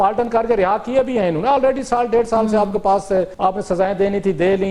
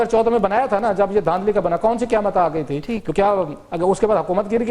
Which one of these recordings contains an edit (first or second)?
first